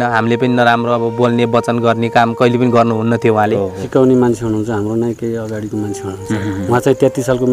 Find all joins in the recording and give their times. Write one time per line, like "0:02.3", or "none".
0:03.8